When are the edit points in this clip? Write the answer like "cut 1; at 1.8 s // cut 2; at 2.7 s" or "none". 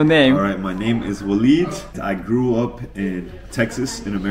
cut 1; at 1.9 s